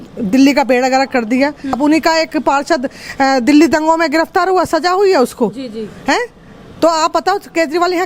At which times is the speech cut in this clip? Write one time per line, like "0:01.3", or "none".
0:01.7